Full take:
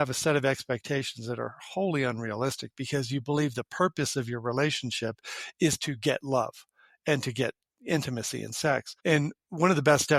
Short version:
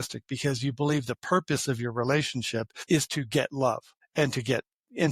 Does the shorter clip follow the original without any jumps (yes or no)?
no